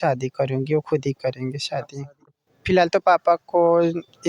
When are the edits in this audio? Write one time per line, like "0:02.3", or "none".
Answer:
0:02.3

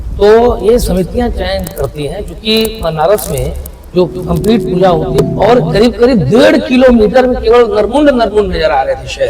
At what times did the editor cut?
0:05.3

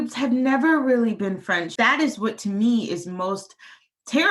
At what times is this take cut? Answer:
0:01.7

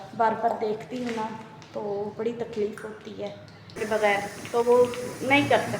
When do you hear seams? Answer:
0:03.8

